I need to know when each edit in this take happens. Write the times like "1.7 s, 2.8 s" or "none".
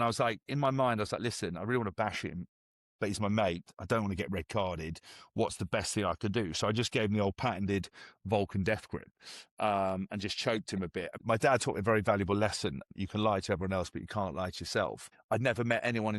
11.2 s, 12.9 s, 15.1 s